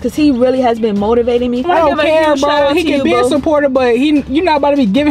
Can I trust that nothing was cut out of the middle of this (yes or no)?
no